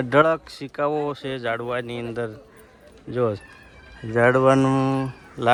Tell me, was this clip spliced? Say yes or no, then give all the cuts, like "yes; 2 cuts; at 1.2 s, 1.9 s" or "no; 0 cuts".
no; 0 cuts